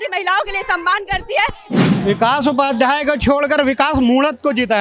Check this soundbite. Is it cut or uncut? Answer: cut